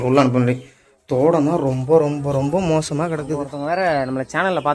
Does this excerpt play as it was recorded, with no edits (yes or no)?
no